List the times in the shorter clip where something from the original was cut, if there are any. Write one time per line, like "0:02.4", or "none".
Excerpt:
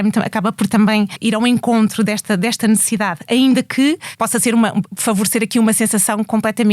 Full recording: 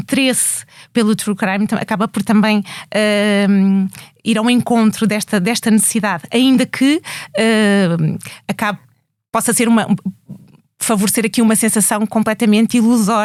0:01.1
0:04.1
0:04.9